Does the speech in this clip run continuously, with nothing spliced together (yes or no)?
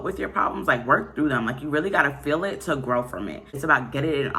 no